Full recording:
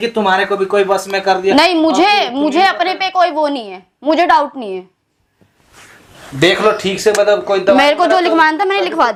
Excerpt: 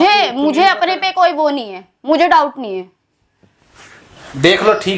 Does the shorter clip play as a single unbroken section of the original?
yes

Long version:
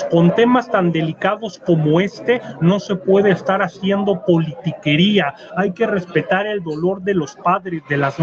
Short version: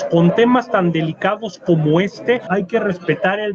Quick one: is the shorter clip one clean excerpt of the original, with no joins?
no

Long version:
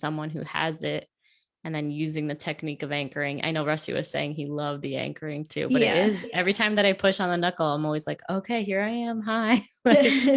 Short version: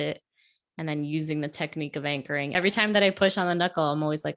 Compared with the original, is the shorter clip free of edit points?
no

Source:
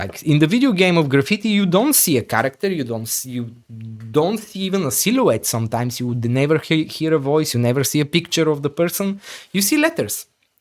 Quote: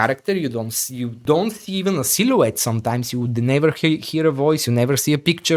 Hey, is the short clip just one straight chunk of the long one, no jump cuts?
no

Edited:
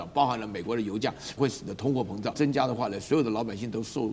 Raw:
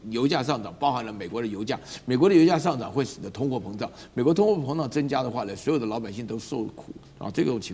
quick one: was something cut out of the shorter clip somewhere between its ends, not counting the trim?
yes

